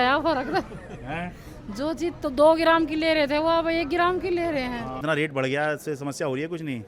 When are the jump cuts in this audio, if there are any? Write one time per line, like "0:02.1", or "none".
0:05.0